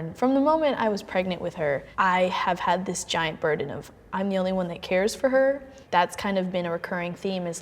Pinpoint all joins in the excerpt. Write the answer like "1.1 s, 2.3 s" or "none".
1.9 s